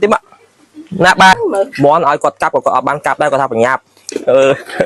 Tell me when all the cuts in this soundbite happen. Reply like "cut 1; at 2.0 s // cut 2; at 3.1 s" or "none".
cut 1; at 1.3 s